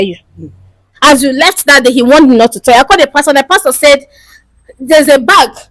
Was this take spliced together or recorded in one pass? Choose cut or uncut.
uncut